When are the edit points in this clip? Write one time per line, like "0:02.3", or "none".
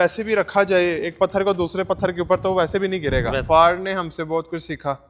0:03.5